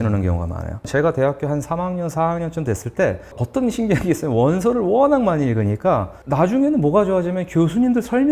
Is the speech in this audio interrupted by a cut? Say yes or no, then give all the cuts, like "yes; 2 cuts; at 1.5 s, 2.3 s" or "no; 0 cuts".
yes; 3 cuts; at 0.9 s, 3.4 s, 6.2 s